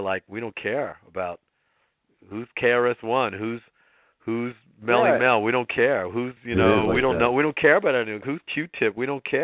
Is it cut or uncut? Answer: cut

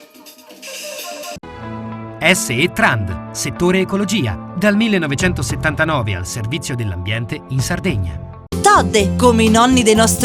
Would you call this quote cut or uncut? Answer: uncut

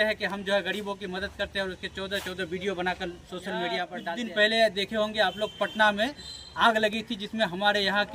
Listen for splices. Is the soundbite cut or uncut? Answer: cut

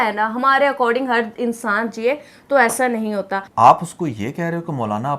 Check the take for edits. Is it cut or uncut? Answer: cut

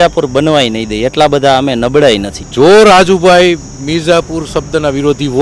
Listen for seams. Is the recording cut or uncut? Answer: cut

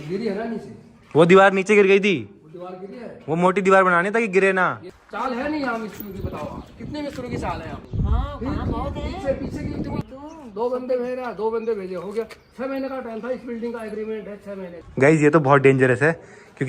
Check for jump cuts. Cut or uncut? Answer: cut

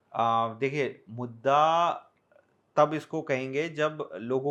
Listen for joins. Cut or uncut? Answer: uncut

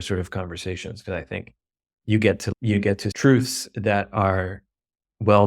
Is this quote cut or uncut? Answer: cut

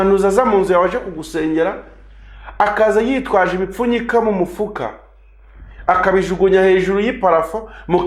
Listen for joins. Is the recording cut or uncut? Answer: uncut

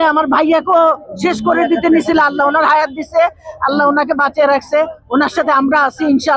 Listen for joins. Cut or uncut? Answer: uncut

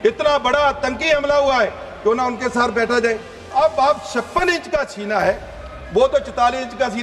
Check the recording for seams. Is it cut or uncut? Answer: cut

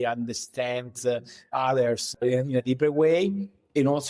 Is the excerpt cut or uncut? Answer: cut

